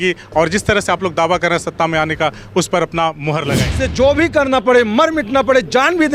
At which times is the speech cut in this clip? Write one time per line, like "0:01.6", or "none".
0:03.8